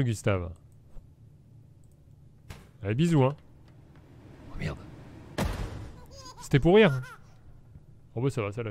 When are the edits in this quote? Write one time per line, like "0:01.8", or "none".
0:05.1